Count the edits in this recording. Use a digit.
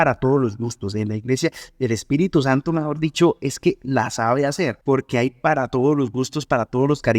1